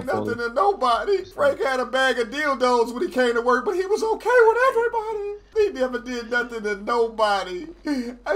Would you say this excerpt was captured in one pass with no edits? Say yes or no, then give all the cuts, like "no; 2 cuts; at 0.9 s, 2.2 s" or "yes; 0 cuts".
no; 2 cuts; at 1.3 s, 5.4 s